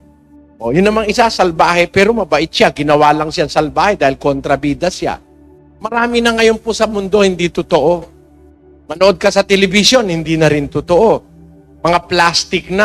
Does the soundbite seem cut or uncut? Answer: uncut